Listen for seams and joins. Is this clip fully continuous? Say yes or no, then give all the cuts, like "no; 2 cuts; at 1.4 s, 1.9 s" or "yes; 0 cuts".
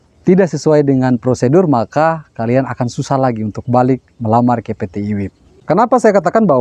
no; 1 cut; at 5.4 s